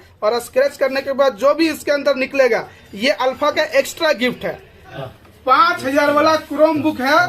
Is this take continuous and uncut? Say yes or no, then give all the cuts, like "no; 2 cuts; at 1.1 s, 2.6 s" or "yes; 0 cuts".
no; 1 cut; at 5.0 s